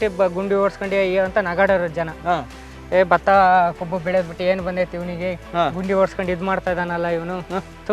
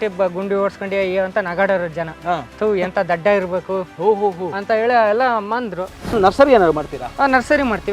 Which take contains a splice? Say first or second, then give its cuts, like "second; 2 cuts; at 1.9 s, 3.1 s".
second; 2 cuts; at 2.5 s, 6.1 s